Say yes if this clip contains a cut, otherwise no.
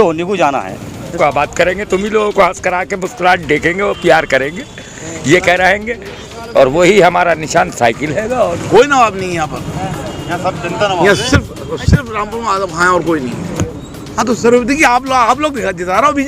yes